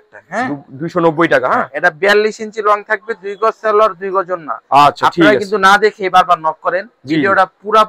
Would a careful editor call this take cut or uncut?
uncut